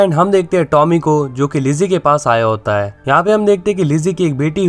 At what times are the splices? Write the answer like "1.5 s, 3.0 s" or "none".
2.9 s